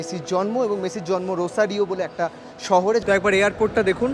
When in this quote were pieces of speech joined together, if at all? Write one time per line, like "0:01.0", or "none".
0:03.0